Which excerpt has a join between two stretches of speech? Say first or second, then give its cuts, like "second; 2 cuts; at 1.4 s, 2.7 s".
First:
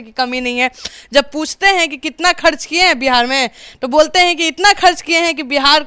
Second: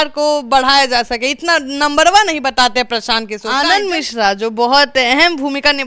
second; 1 cut; at 3.4 s